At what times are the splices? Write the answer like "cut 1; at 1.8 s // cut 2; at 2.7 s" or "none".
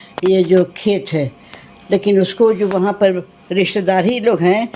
none